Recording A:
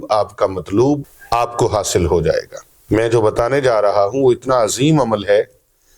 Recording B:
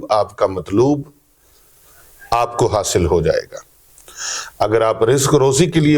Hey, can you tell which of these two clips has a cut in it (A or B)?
A